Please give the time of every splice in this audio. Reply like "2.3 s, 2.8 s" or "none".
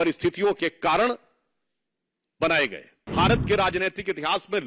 3.1 s